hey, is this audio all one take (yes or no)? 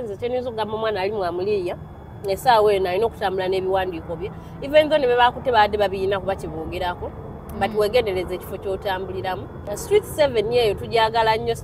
no